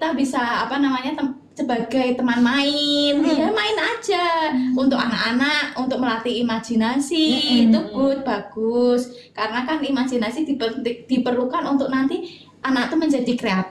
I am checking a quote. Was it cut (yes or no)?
no